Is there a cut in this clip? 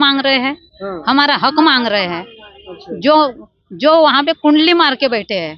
no; 0 cuts

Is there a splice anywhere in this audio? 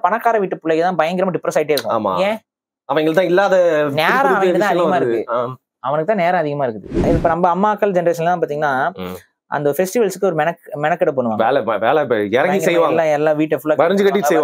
yes; 1 cut; at 7.1 s

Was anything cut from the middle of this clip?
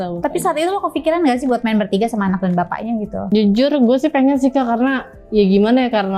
yes; 1 cut; at 3.3 s

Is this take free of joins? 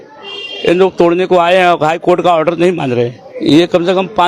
no; 1 cut; at 3.2 s

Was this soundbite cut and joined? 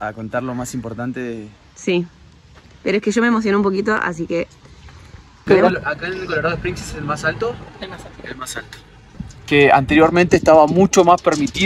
yes; 2 cuts; at 5.4 s, 9.3 s

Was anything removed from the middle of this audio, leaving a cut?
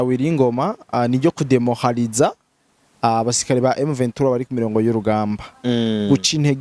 no; 0 cuts

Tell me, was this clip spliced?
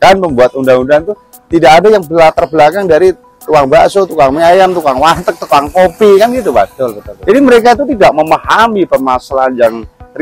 no; 0 cuts

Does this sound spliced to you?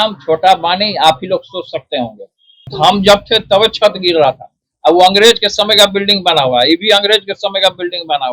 yes; 1 cut; at 2.7 s

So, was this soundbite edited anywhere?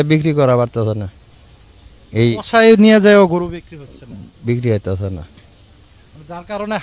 no; 0 cuts

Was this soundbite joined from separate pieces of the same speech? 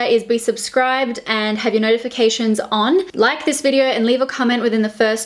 yes; 1 cut; at 3.1 s

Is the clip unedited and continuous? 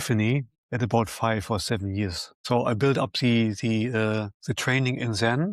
no; 1 cut; at 2.3 s

